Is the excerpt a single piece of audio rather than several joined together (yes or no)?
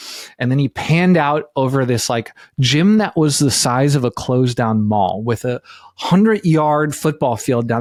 yes